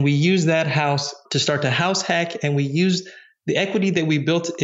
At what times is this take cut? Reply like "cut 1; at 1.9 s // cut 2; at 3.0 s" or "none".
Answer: cut 1; at 1.2 s